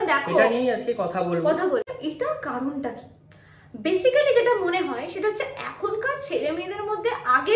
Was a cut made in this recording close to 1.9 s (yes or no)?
yes